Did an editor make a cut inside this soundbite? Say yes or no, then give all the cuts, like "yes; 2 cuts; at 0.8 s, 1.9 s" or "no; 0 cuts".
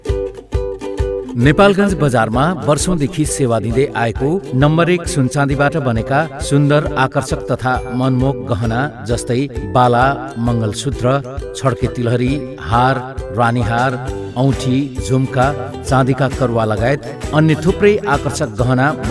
no; 0 cuts